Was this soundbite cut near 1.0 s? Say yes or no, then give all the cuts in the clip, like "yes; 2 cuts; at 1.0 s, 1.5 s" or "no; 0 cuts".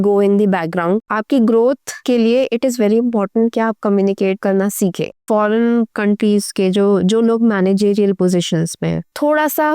yes; 2 cuts; at 1.0 s, 5.2 s